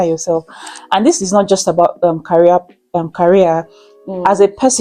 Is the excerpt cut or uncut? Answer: uncut